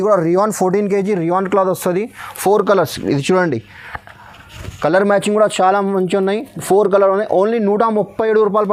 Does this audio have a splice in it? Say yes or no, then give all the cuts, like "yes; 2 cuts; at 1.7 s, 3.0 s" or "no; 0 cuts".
no; 0 cuts